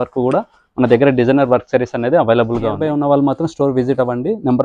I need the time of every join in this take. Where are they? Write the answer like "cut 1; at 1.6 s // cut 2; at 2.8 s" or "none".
cut 1; at 2.8 s